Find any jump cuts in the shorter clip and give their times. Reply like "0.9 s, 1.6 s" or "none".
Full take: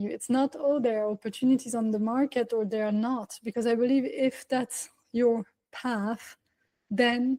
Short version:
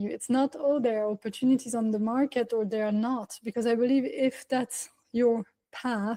none